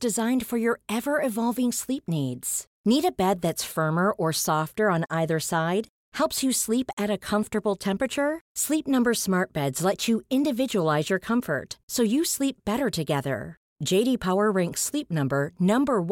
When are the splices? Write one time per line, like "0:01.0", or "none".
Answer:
none